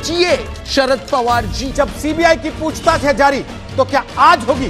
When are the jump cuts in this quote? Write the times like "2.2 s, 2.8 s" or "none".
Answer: 1.6 s